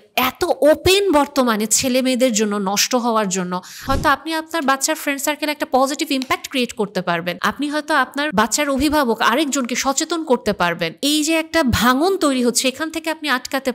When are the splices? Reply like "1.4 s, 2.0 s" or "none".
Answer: 3.7 s, 7.3 s, 8.3 s, 10.9 s